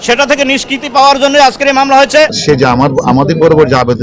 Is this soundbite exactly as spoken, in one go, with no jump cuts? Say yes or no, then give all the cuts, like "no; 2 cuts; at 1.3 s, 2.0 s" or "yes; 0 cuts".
no; 1 cut; at 2.4 s